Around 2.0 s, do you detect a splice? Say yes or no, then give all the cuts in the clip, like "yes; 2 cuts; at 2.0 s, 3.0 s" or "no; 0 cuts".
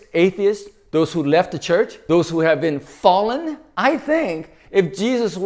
yes; 2 cuts; at 2.0 s, 3.6 s